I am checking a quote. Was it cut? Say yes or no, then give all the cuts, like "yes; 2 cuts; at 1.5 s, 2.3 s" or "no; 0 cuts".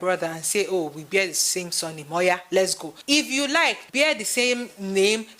yes; 1 cut; at 3.8 s